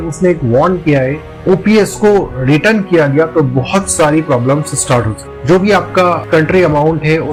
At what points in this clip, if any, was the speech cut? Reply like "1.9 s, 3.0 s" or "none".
none